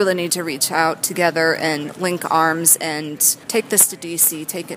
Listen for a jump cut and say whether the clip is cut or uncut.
cut